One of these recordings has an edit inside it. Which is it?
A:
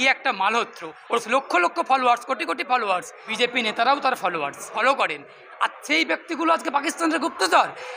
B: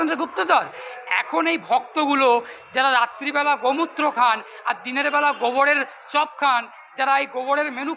A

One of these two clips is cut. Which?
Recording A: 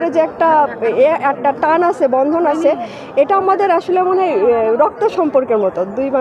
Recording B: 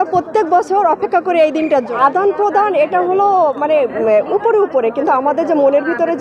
B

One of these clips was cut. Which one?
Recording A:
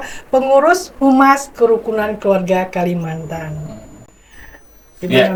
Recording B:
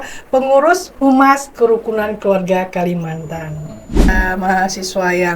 B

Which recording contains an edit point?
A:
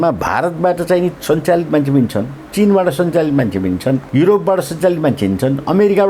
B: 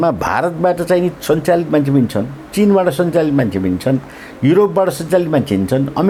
A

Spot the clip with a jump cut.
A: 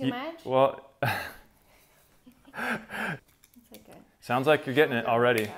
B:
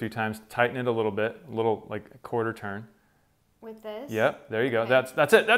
A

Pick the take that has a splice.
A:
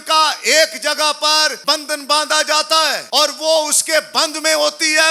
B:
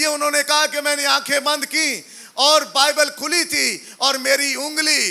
A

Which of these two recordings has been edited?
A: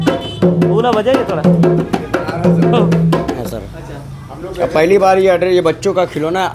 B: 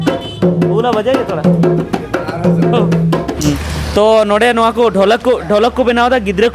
A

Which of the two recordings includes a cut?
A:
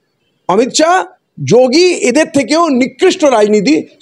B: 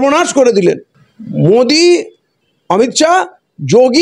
B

